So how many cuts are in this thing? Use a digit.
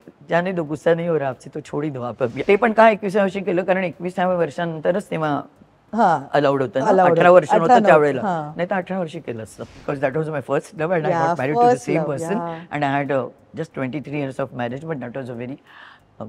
2